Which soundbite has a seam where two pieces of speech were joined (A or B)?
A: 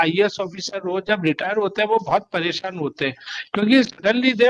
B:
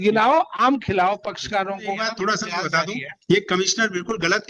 B